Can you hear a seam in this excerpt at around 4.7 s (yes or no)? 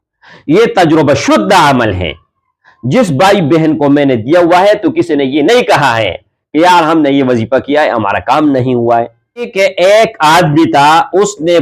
no